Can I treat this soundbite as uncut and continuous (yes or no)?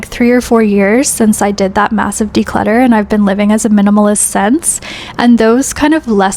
yes